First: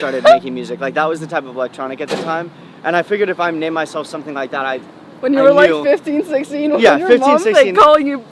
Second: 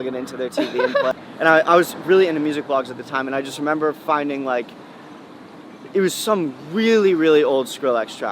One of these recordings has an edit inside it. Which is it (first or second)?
second